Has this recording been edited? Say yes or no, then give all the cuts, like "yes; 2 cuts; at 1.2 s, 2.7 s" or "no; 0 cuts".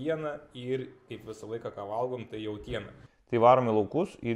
yes; 1 cut; at 3.0 s